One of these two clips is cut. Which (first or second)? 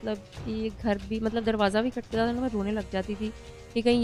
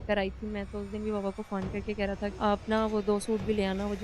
second